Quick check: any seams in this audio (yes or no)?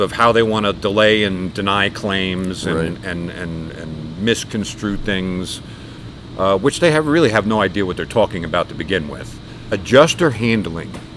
yes